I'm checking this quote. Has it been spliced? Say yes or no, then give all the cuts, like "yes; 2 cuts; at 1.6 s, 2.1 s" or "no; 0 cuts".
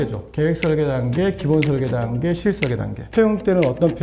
yes; 1 cut; at 3.0 s